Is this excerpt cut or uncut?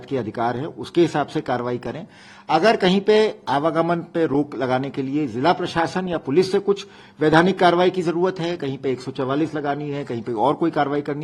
uncut